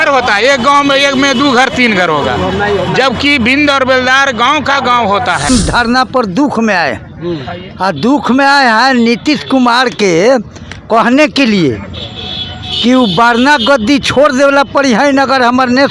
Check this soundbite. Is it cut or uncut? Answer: cut